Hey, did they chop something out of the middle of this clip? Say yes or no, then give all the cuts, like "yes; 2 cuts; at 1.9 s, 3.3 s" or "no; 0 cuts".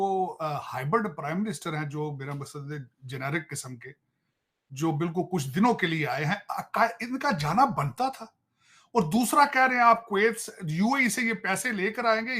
no; 0 cuts